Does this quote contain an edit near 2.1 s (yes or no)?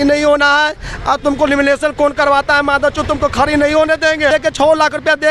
no